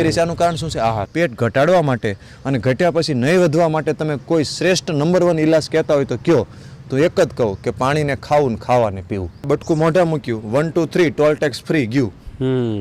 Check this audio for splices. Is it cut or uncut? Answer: cut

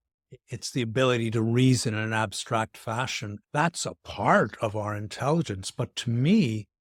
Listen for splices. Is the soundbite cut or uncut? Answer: uncut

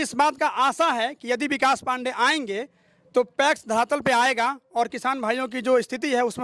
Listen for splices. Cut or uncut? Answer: uncut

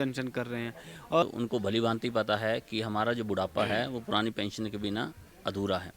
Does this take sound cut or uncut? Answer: cut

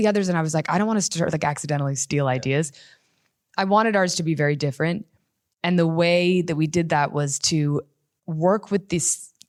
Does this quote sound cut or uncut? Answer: uncut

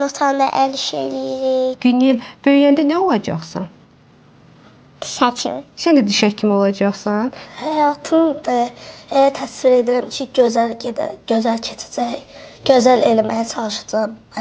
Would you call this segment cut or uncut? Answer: cut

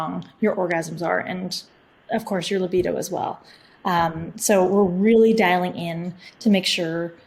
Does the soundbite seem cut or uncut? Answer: uncut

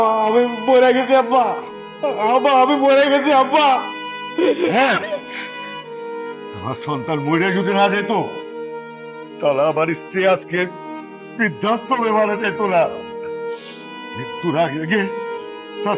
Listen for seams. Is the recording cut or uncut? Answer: uncut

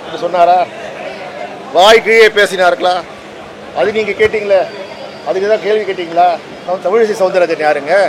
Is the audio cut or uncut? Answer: cut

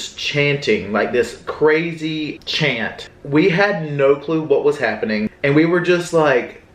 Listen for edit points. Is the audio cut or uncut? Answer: cut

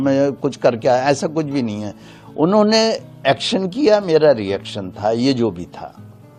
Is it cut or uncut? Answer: uncut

